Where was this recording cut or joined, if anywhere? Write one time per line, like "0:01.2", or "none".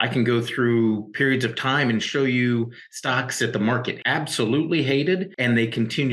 0:04.0
0:05.3

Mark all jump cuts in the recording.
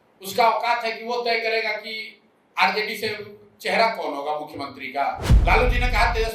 0:05.3

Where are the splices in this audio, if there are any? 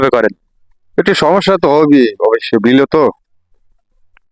none

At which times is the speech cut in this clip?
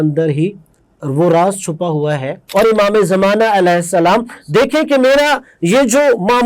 0:02.4

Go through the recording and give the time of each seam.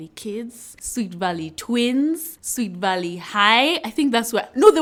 none

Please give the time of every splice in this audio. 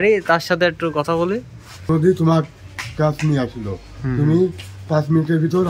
0:01.9

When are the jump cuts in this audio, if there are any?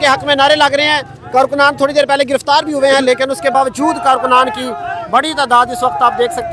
none

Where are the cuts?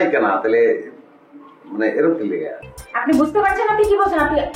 0:02.6

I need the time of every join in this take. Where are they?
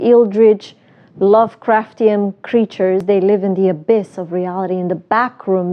0:03.0

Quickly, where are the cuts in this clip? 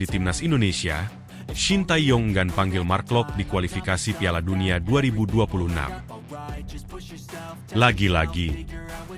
0:06.0
0:07.7

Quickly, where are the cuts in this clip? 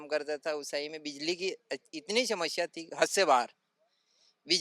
none

